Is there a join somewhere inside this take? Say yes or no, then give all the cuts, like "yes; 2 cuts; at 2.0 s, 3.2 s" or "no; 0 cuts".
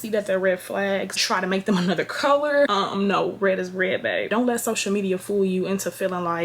yes; 1 cut; at 4.3 s